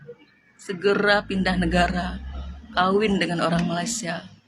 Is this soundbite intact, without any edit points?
yes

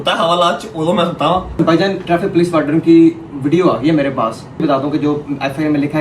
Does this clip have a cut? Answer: yes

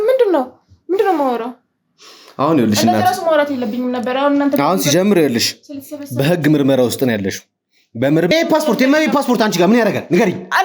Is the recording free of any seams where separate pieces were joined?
no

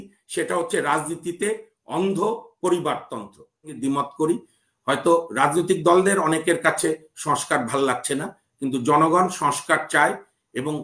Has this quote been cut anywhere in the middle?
yes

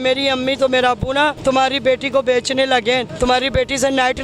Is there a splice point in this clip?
yes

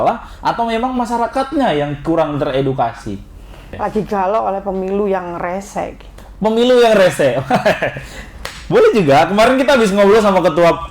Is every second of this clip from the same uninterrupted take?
no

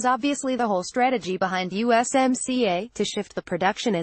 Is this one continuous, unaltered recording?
yes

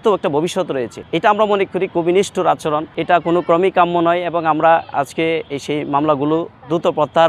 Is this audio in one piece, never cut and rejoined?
yes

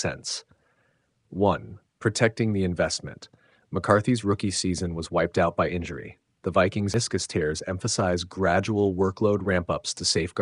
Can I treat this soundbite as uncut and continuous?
no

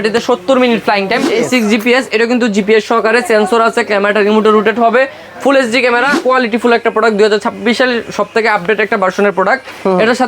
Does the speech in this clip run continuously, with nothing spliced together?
no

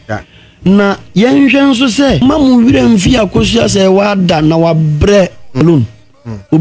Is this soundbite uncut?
no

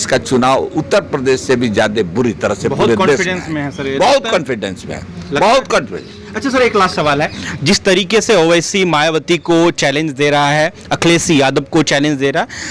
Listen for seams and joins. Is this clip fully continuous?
yes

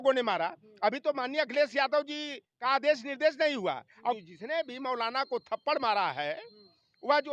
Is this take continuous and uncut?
no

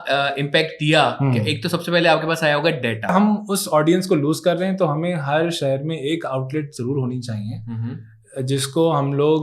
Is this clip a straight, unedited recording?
no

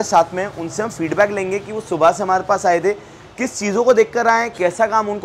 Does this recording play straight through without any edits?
yes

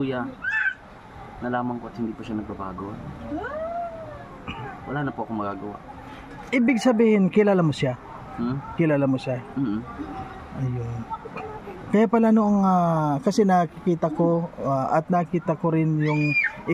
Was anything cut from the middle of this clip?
no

